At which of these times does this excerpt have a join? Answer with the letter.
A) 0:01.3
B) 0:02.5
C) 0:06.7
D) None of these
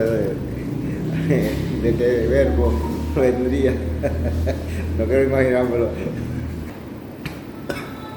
C